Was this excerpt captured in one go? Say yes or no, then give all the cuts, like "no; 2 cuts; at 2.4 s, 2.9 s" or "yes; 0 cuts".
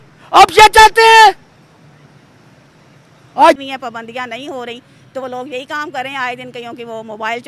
no; 1 cut; at 3.6 s